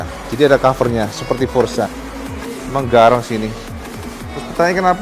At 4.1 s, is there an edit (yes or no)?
no